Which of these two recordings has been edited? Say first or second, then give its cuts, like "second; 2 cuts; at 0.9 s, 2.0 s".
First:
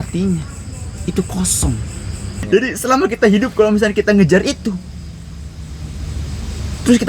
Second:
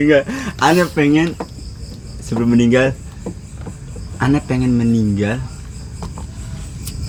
first; 1 cut; at 2.3 s